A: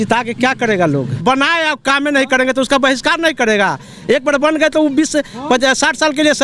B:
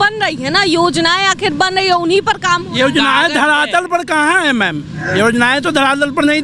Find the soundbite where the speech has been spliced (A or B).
A